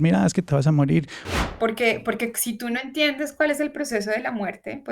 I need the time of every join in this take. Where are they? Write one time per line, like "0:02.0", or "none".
0:01.2